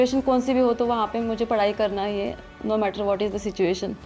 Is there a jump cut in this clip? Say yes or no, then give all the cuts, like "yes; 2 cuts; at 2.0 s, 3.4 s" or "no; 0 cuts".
yes; 1 cut; at 2.5 s